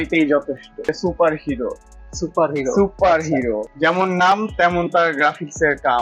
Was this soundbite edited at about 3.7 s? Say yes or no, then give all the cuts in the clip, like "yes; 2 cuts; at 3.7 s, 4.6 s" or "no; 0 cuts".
yes; 2 cuts; at 0.9 s, 3.7 s